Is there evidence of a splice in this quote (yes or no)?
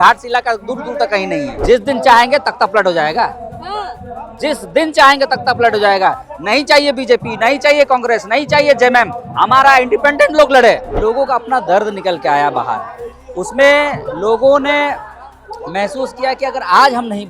yes